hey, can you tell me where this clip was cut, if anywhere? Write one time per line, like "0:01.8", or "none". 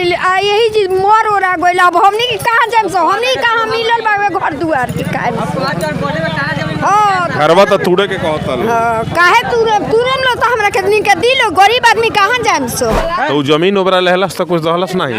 0:13.0